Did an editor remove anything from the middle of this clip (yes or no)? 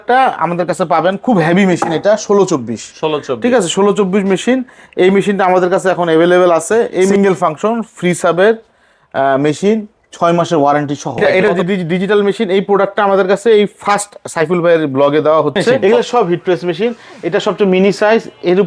yes